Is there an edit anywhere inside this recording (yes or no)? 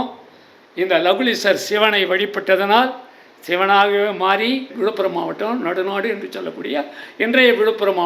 yes